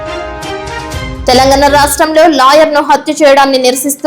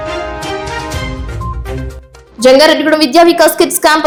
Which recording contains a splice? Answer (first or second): first